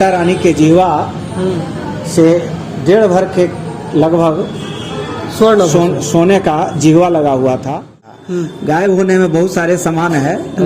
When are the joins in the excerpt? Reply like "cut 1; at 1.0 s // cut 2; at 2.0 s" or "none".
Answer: cut 1; at 8.0 s